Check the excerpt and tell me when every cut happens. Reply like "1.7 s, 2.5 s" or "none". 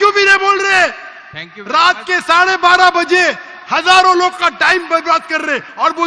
none

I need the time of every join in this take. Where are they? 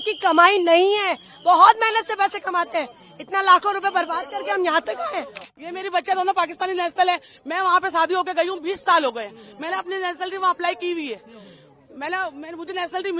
5.5 s

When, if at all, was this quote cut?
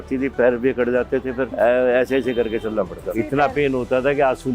1.5 s, 3.1 s

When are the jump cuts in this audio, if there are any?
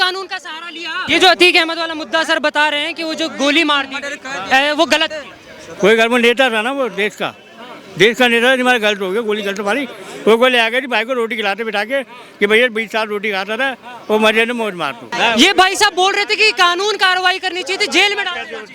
1.0 s, 15.1 s

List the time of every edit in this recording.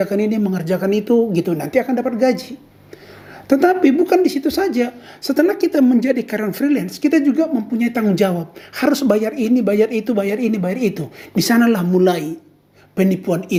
none

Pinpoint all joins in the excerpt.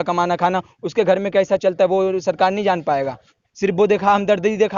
none

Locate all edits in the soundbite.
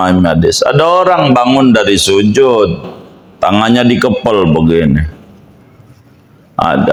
none

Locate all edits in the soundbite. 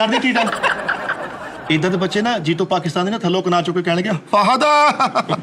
1.5 s

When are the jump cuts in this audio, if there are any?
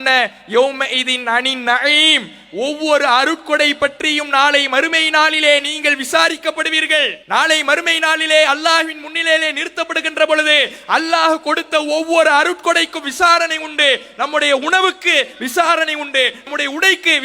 7.2 s

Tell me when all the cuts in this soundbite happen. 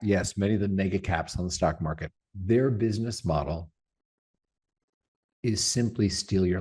none

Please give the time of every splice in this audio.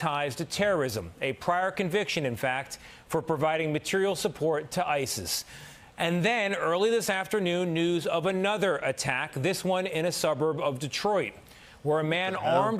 none

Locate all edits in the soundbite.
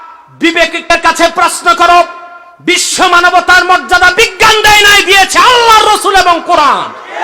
0.9 s

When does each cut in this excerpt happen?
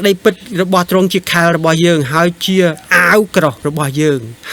none

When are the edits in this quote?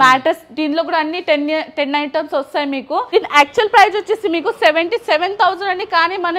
3.1 s

